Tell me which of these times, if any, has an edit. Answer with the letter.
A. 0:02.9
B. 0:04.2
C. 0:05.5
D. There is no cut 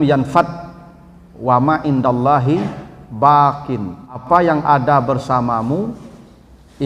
B